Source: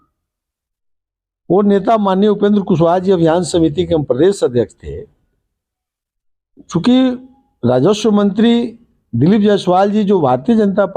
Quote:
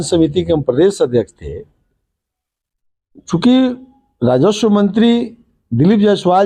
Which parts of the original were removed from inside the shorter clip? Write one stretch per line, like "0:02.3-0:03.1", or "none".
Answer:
none